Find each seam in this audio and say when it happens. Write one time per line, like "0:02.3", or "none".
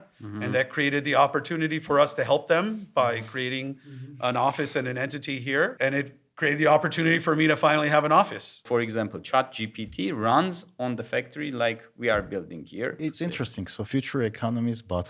0:05.7
0:08.6
0:13.4